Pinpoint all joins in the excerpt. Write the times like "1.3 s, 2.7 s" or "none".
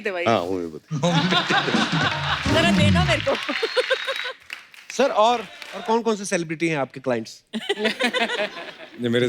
5.8 s